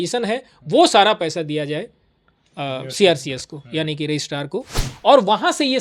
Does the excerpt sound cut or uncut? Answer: uncut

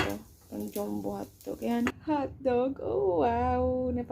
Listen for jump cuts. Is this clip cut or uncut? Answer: cut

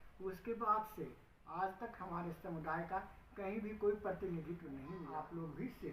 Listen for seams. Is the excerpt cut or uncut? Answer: cut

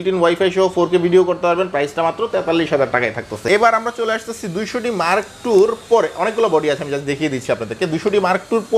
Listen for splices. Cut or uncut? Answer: uncut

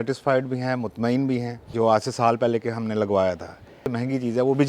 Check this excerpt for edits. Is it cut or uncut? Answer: cut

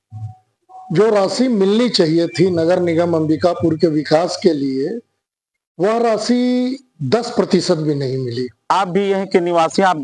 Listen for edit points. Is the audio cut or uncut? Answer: cut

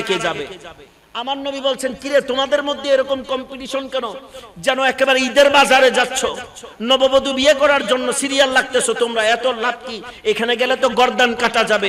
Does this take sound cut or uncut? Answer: uncut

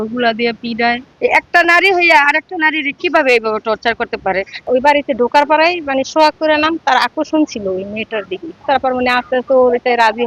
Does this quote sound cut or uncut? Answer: cut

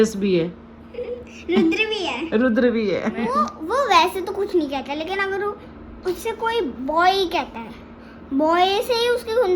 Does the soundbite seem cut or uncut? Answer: cut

